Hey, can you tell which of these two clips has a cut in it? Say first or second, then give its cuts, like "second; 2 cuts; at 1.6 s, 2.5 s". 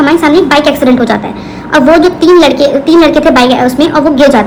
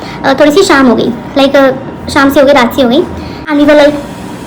second; 1 cut; at 3.3 s